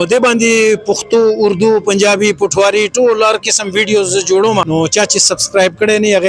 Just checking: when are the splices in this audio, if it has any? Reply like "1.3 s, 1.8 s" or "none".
4.7 s